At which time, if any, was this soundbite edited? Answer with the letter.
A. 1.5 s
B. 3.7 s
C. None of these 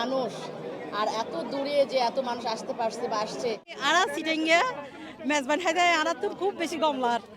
B